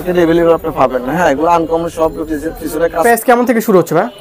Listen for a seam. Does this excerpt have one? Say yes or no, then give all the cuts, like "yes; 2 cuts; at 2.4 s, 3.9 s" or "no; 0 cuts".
yes; 1 cut; at 3.0 s